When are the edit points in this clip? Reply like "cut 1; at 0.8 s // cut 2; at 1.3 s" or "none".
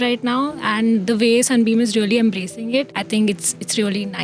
cut 1; at 3.0 s